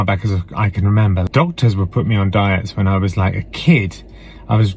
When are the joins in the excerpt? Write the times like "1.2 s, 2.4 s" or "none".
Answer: 1.3 s